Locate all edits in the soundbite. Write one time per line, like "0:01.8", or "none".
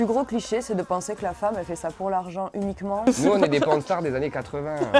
0:03.0